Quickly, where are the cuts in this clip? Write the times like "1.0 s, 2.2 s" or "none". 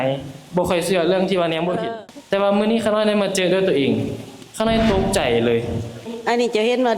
1.9 s, 6.1 s